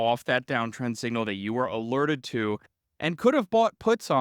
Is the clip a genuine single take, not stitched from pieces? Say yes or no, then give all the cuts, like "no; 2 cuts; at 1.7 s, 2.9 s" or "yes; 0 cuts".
yes; 0 cuts